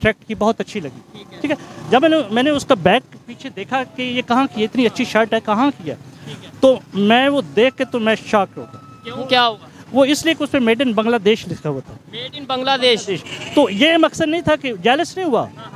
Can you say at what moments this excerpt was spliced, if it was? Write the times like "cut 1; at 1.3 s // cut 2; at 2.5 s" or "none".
none